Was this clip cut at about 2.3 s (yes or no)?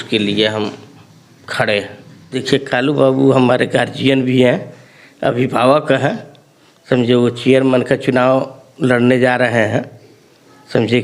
yes